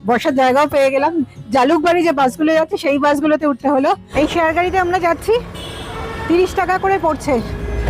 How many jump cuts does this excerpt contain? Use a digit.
1